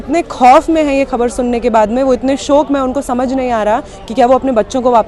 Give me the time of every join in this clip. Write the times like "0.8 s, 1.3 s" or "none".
none